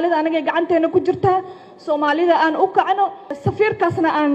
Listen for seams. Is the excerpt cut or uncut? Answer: cut